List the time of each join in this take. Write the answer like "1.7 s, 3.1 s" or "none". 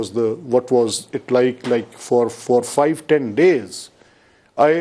none